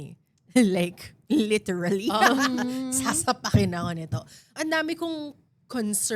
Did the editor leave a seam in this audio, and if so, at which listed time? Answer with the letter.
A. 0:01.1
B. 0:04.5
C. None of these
B